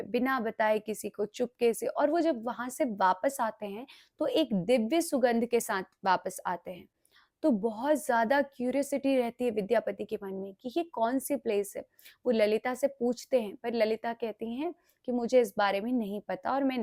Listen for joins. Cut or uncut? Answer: uncut